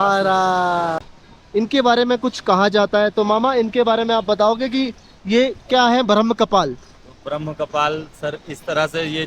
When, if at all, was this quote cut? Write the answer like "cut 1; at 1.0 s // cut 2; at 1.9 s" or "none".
cut 1; at 1.0 s